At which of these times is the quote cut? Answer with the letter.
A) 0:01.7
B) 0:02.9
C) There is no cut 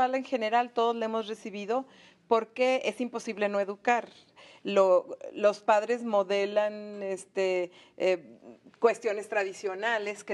A